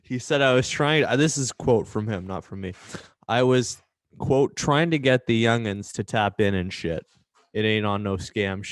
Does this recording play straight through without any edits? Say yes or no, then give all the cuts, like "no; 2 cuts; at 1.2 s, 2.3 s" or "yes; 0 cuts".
yes; 0 cuts